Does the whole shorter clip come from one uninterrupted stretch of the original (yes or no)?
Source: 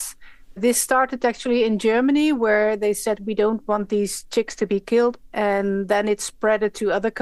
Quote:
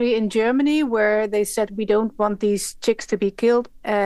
yes